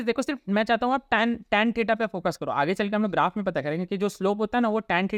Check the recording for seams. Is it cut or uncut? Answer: uncut